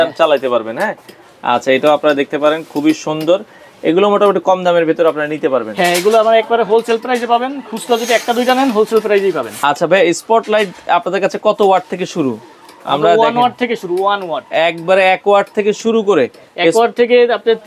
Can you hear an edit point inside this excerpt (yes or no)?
no